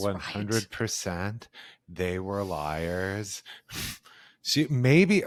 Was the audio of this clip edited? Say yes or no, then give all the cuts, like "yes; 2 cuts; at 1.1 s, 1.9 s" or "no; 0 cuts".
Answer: no; 0 cuts